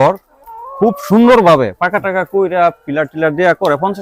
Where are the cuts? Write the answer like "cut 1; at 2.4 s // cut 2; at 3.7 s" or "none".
none